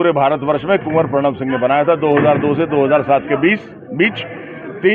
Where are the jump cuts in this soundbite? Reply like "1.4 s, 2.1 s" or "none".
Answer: none